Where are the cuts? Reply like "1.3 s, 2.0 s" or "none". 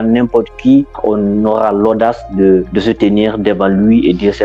none